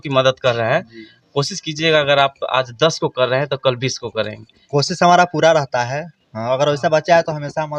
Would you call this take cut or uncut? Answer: uncut